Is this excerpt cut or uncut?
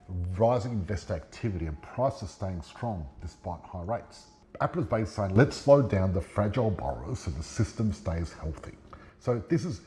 uncut